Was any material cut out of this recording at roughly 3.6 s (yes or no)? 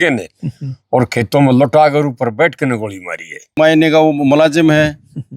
yes